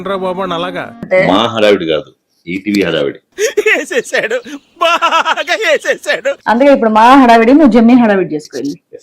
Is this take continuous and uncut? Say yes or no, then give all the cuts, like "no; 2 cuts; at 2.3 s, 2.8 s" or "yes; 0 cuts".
no; 2 cuts; at 1.0 s, 6.4 s